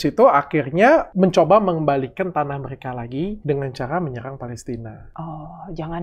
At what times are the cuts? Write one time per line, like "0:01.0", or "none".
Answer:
0:01.1
0:03.4
0:05.0